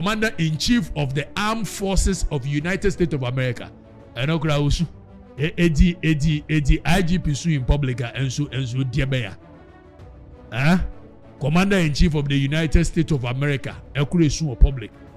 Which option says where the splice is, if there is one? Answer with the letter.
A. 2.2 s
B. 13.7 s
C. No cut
B